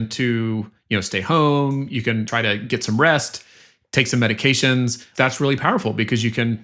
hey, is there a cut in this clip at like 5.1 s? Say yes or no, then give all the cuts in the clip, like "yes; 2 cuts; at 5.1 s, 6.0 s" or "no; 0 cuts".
yes; 2 cuts; at 2.3 s, 5.1 s